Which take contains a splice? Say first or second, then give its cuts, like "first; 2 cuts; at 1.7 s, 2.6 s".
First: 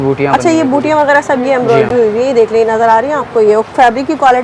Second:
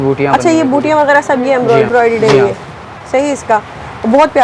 second; 1 cut; at 1.9 s